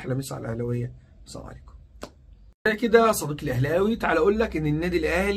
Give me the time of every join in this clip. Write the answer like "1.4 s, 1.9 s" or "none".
2.5 s